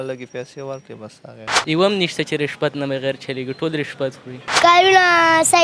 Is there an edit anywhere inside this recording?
yes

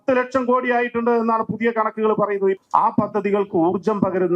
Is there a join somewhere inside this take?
yes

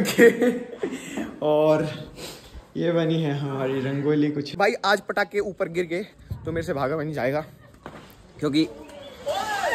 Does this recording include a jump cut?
yes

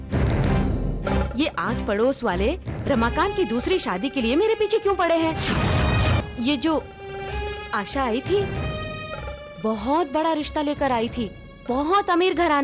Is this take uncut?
no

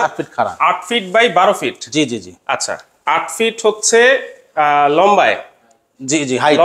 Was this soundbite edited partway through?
no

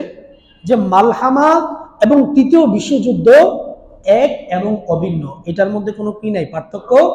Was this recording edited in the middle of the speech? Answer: no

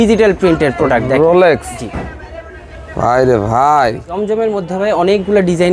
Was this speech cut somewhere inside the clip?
yes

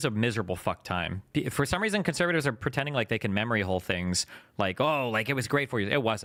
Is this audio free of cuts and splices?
yes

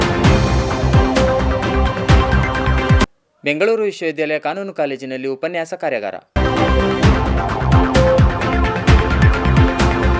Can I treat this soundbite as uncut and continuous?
no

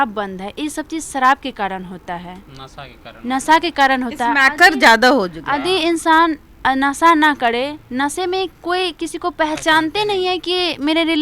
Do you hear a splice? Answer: no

